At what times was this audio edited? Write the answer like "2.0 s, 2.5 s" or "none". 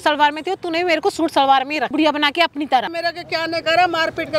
1.9 s, 2.9 s